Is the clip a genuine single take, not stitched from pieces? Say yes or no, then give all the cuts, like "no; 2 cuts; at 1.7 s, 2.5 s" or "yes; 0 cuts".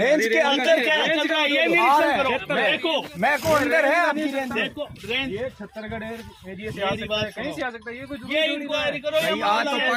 yes; 0 cuts